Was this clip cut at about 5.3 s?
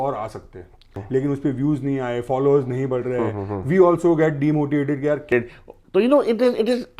yes; 2 cuts; at 0.9 s, 5.3 s

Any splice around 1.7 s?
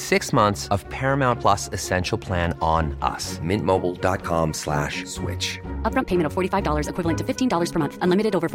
no; 0 cuts

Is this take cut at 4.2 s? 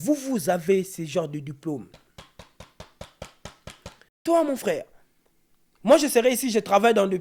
yes; 1 cut; at 4.2 s

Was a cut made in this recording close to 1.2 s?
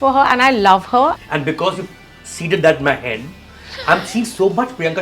yes; 1 cut; at 1.2 s

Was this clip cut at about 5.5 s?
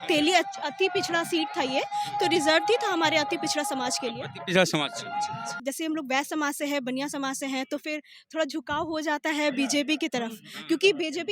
yes; 1 cut; at 5.5 s

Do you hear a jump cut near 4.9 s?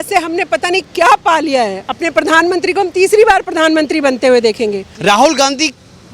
yes; 1 cut; at 4.9 s

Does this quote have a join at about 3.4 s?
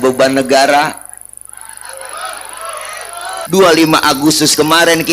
yes; 1 cut; at 3.4 s

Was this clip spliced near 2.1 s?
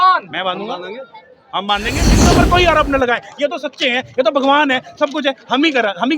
yes; 1 cut; at 2.1 s

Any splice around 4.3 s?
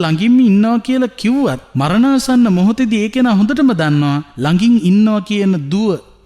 yes; 2 cuts; at 1.7 s, 4.3 s

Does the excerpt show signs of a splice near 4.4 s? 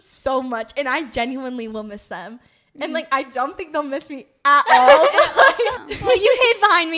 no; 1 cut; at 5.9 s

